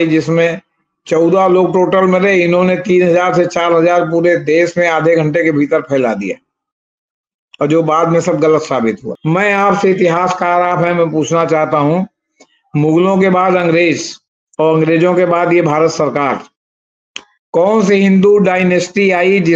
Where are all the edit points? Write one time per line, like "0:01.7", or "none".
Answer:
0:09.1